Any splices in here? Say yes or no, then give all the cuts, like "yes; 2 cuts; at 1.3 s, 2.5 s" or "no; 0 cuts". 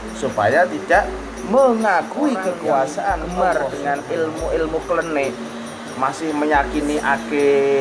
yes; 1 cut; at 3.4 s